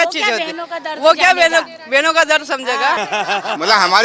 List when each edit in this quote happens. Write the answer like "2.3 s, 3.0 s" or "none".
3.0 s